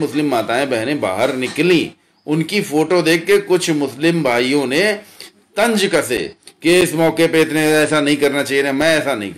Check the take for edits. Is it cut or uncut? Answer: uncut